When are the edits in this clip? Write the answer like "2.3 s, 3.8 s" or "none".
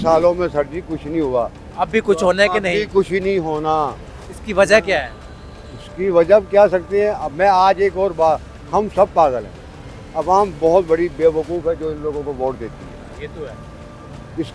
none